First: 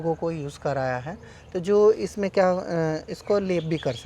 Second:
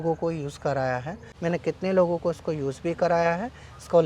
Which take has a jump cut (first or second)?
second